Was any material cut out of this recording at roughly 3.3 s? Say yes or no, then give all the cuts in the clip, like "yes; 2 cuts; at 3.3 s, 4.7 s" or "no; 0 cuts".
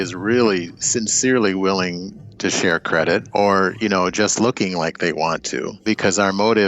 yes; 2 cuts; at 3.3 s, 5.8 s